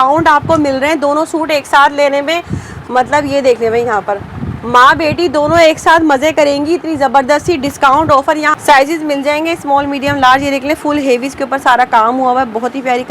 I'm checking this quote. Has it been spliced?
yes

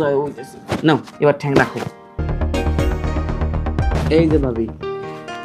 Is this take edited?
yes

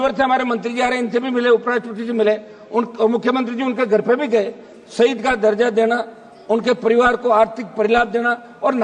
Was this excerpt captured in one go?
yes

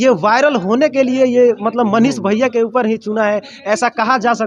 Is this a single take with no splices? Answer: yes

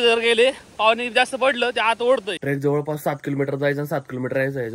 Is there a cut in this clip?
yes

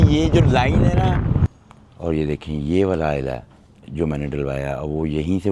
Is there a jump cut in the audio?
yes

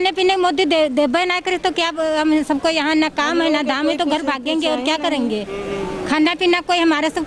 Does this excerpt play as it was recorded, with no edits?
yes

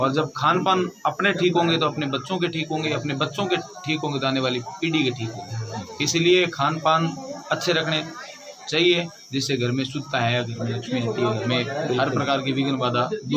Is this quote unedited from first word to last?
yes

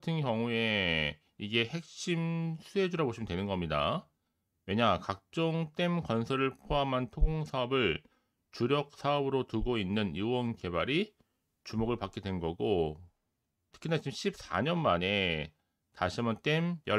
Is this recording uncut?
yes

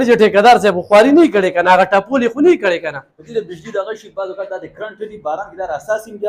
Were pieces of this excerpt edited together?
yes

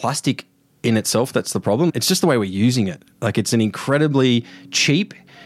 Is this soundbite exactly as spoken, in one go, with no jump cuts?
no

